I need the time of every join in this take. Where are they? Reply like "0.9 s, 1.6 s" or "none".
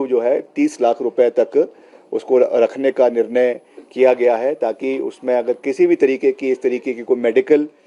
none